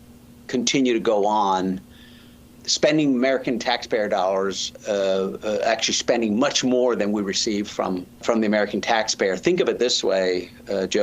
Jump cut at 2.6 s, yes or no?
yes